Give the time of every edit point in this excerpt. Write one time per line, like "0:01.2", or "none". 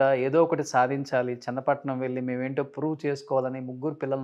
none